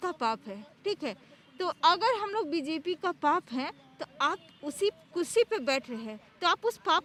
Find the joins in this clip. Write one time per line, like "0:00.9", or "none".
none